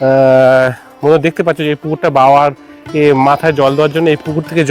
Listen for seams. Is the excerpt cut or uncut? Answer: uncut